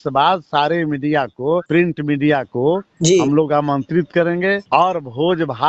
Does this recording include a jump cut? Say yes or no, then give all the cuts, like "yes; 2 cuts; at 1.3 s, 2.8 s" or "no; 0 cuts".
yes; 2 cuts; at 1.7 s, 4.6 s